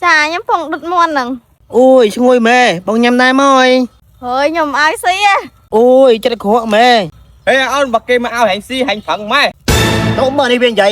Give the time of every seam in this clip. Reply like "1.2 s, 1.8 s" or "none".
7.1 s